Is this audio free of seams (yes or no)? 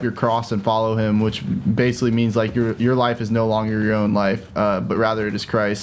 yes